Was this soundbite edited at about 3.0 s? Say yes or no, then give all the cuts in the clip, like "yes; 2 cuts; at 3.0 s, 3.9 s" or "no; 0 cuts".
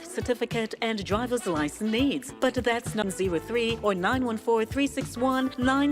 yes; 1 cut; at 3.0 s